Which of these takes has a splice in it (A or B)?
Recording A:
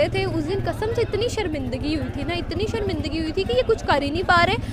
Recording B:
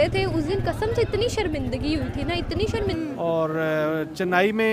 B